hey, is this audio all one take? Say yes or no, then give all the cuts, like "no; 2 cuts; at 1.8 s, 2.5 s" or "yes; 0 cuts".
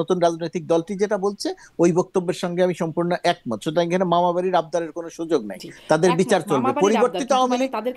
yes; 0 cuts